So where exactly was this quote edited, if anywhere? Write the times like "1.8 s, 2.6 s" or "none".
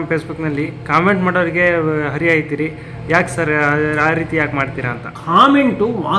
none